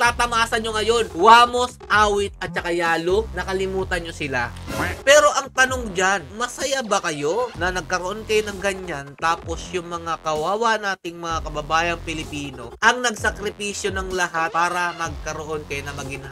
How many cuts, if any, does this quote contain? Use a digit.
2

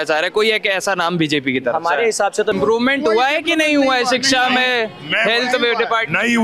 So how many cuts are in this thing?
1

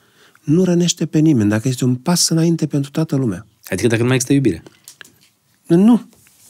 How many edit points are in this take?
0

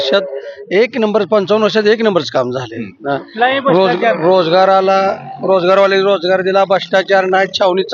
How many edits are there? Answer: 0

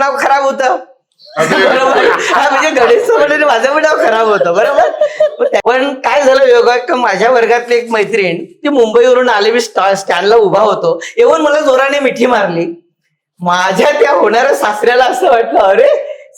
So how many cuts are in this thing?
1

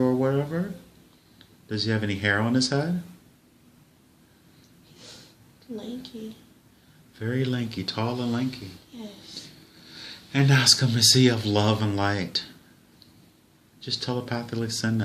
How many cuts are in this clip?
1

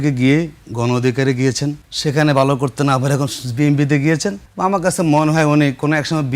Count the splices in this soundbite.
2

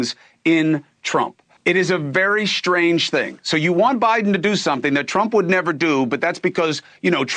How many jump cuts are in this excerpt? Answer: 1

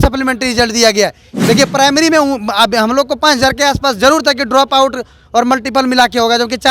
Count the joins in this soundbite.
1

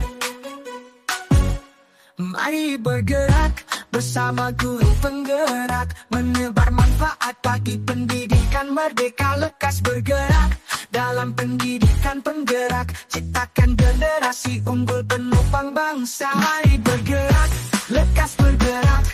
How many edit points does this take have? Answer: 0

